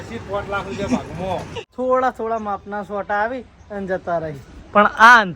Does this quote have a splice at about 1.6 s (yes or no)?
yes